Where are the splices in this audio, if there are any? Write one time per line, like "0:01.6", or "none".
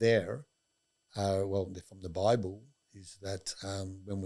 none